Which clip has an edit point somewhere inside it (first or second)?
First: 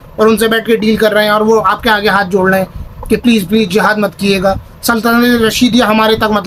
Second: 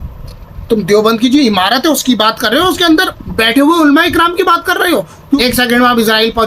second